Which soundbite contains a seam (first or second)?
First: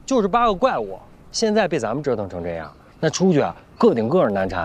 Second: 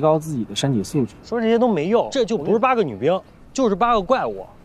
second